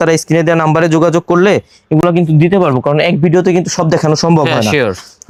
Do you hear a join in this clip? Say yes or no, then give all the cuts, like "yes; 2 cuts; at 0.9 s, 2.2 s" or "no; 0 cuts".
no; 0 cuts